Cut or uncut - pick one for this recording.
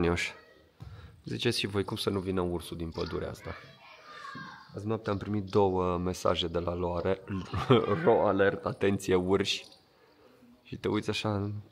uncut